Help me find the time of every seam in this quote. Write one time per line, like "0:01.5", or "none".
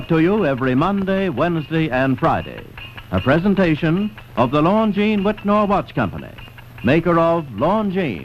0:05.4